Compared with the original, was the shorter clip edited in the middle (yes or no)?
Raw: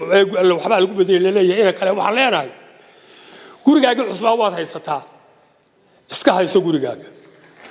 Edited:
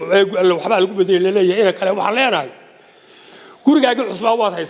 no